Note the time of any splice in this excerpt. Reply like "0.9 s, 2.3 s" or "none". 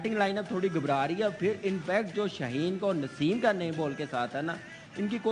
none